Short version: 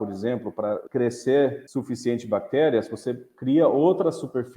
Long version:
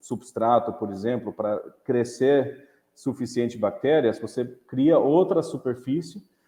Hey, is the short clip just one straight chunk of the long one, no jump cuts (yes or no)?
no